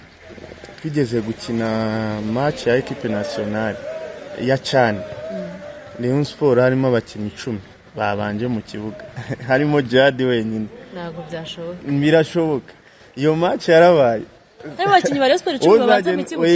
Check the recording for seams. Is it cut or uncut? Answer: uncut